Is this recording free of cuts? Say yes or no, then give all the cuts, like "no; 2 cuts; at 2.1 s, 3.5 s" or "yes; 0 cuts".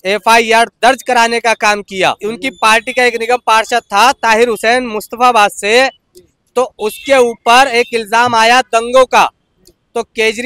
no; 1 cut; at 2.2 s